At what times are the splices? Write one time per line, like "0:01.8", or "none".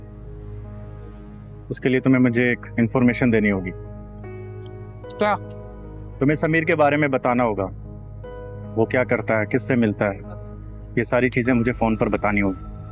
none